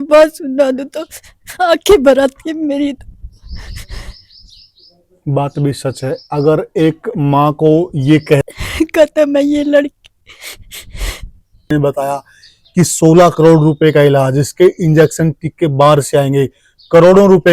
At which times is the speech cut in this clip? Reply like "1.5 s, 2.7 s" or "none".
8.4 s, 11.7 s